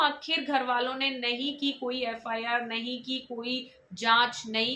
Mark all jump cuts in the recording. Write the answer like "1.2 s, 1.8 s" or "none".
none